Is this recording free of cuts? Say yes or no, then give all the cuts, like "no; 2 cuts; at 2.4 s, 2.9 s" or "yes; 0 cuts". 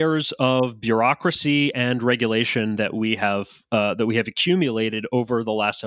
yes; 0 cuts